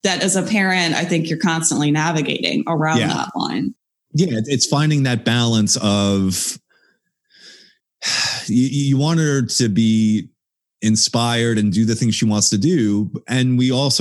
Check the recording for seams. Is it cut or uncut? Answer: uncut